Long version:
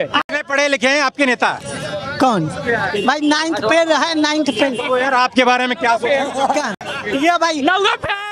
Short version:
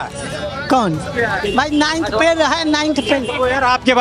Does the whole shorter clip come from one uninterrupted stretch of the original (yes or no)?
yes